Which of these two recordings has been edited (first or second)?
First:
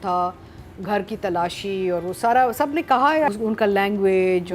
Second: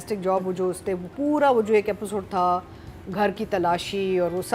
first